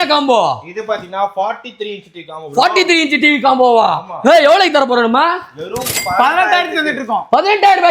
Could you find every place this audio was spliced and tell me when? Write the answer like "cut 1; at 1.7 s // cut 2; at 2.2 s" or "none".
none

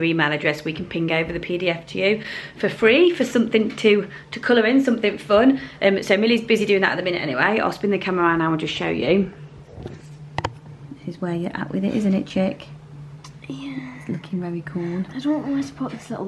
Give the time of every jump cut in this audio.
none

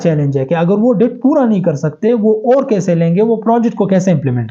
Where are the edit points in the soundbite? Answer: none

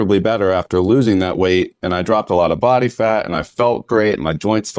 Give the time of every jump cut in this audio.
none

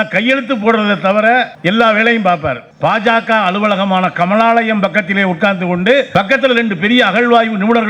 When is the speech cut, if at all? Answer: cut 1; at 2.6 s // cut 2; at 6.1 s

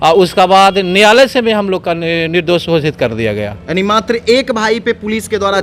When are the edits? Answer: none

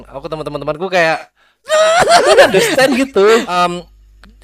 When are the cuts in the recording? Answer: cut 1; at 3.5 s

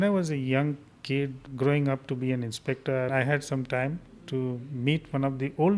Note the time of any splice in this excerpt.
cut 1; at 3.1 s

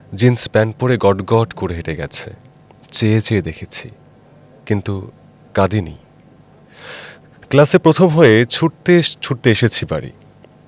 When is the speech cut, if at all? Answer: none

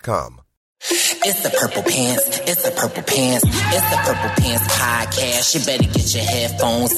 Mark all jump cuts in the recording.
cut 1; at 1.0 s

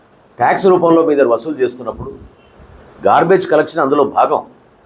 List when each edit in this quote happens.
none

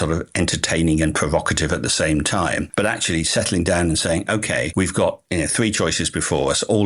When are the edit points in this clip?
none

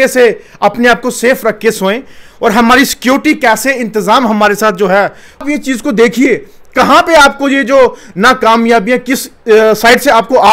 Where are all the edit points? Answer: cut 1; at 5.4 s

